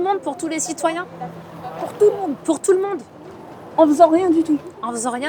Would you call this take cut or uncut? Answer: uncut